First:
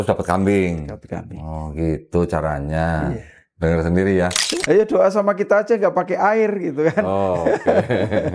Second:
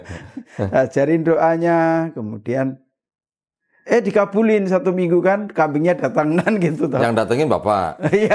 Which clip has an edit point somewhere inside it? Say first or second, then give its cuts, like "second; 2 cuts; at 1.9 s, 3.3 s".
first; 1 cut; at 4.4 s